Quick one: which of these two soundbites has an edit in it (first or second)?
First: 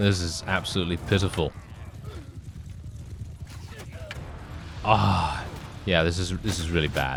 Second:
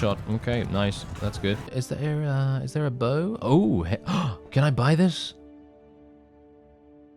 second